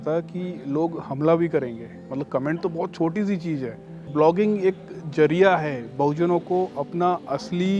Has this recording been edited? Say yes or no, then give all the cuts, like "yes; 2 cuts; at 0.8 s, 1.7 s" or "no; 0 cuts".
yes; 1 cut; at 4.1 s